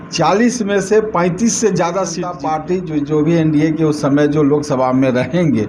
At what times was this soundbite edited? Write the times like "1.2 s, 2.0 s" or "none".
2.3 s